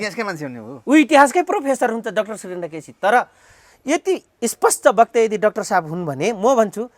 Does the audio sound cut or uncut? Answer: uncut